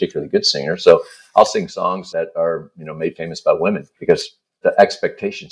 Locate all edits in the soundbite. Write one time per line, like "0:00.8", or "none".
0:02.0
0:03.9